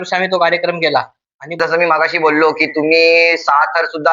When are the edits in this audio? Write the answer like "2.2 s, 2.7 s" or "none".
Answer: 1.6 s